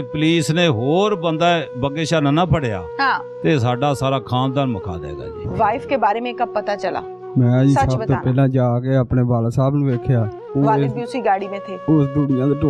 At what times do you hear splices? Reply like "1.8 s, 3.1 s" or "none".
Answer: none

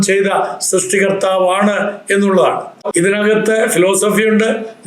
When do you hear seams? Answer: 2.9 s

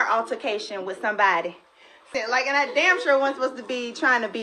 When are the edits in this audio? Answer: 2.1 s

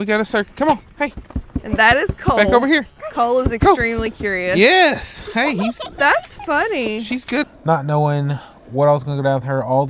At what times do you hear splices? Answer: 7.4 s

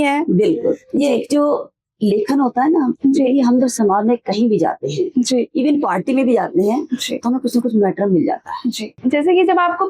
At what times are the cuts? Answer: 8.9 s

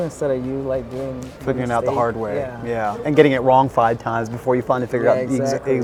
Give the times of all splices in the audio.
none

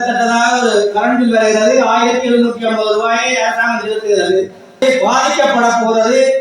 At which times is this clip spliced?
4.8 s

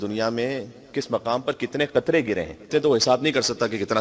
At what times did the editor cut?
2.7 s

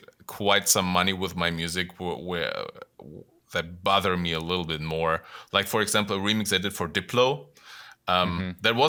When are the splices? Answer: none

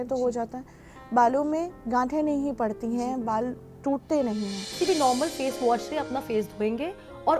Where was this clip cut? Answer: 4.7 s

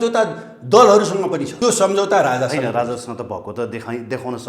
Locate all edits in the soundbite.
1.5 s

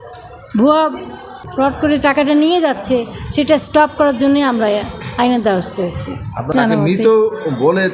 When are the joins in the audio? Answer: 1.4 s, 6.5 s

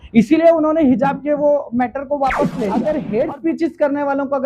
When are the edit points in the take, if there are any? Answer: 2.8 s

